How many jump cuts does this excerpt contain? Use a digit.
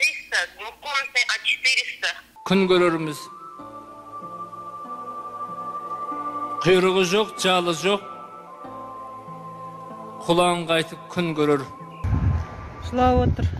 2